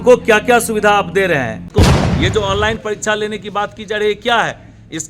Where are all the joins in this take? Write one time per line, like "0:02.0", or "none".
0:01.7